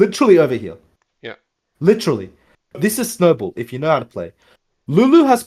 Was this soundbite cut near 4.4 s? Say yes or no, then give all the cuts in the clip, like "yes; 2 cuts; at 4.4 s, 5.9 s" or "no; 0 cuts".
no; 1 cut; at 2.8 s